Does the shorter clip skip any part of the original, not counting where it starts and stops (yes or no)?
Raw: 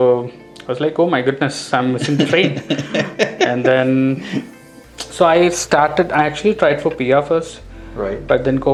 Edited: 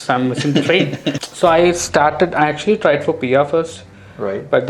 yes